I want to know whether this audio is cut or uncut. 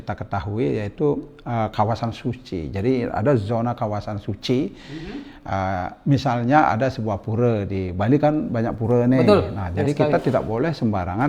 uncut